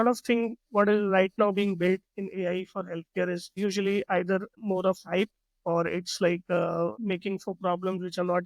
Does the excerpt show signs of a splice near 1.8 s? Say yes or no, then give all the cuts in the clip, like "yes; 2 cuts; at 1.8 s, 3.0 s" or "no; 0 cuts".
no; 3 cuts; at 3.5 s, 4.6 s, 7.0 s